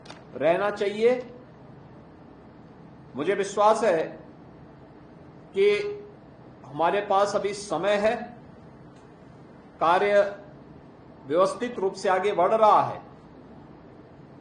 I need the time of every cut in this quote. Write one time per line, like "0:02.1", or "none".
none